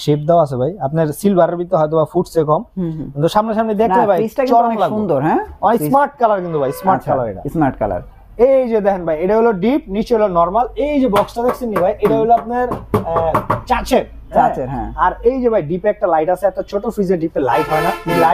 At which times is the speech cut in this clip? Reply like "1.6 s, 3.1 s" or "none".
none